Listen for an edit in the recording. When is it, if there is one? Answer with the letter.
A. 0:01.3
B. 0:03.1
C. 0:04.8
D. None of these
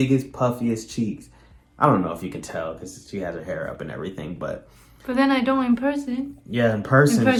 D